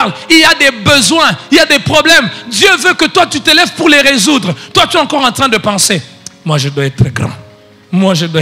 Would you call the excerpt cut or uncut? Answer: uncut